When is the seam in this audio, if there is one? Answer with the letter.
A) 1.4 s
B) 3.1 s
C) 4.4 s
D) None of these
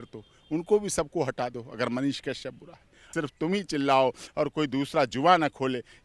B